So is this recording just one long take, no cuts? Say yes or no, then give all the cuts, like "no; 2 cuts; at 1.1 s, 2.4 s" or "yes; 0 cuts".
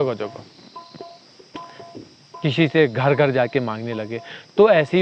yes; 0 cuts